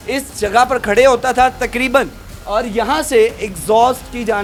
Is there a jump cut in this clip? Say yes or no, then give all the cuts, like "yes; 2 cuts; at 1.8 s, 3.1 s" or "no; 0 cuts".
no; 0 cuts